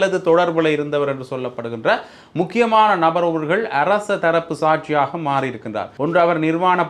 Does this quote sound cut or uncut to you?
cut